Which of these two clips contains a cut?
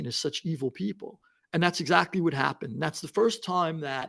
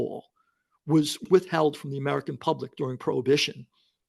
second; 1 cut; at 1.2 s

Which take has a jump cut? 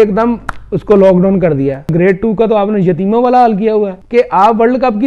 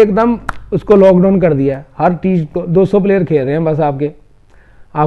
first; 2 cuts; at 1.9 s, 4.0 s

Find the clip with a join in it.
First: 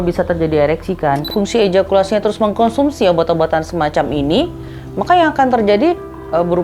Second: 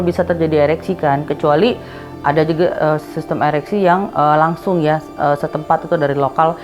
first; 1 cut; at 1.2 s

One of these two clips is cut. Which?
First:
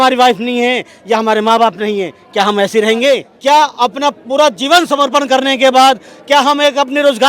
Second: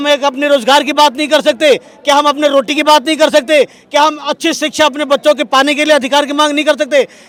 first; 1 cut; at 3.3 s

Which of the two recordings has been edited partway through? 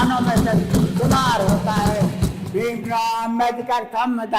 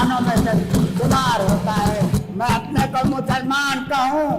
second; 1 cut; at 2.1 s

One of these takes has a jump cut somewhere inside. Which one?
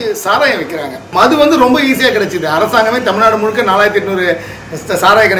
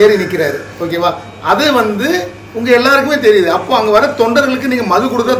first; 1 cut; at 1.0 s

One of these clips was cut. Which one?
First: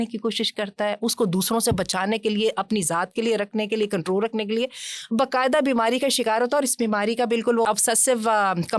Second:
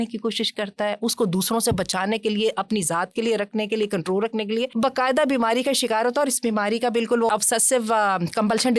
second; 1 cut; at 4.7 s

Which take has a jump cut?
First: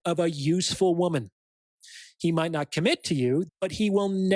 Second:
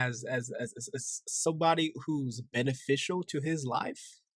first; 1 cut; at 3.5 s

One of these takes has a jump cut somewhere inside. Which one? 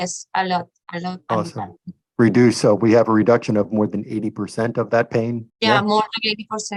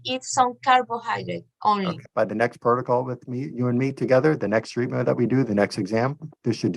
second; 1 cut; at 2.1 s

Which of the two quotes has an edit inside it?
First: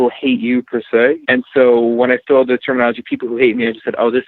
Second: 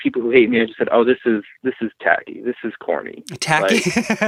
first; 1 cut; at 1.2 s

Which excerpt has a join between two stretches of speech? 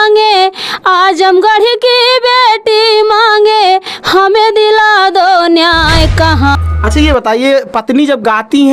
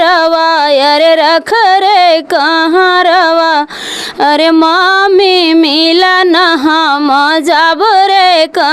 first; 1 cut; at 6.6 s

